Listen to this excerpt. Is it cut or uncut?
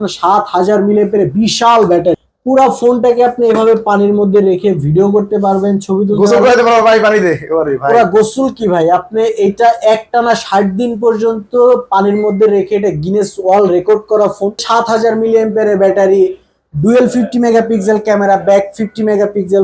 cut